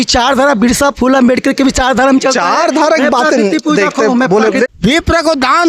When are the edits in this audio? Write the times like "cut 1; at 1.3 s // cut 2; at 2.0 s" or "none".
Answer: cut 1; at 4.7 s